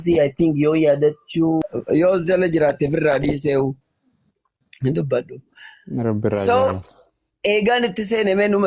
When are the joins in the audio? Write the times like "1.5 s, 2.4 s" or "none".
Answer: 1.6 s